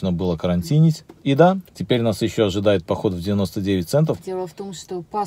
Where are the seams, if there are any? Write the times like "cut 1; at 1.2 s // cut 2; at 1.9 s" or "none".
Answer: cut 1; at 1.1 s // cut 2; at 1.7 s // cut 3; at 4.2 s